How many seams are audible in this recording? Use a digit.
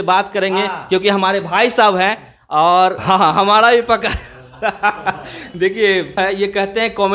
2